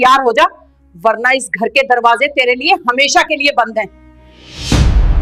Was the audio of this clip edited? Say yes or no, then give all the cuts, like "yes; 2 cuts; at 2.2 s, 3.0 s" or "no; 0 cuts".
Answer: no; 0 cuts